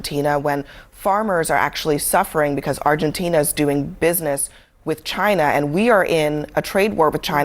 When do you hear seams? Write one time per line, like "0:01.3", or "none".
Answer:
0:05.8